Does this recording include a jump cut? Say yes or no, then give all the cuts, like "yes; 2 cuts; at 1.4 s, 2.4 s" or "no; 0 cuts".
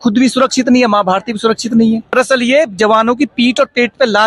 yes; 1 cut; at 2.1 s